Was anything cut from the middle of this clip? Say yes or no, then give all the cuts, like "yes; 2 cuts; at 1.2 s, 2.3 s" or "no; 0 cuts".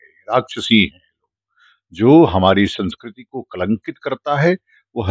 no; 0 cuts